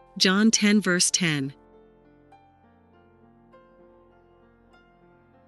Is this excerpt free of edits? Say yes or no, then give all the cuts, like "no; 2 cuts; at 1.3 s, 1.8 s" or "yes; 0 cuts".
no; 2 cuts; at 1.5 s, 3.9 s